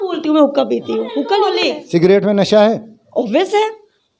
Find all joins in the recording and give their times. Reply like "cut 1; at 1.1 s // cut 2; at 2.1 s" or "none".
cut 1; at 1.5 s